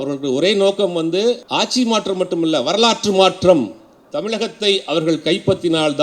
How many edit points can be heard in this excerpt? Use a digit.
1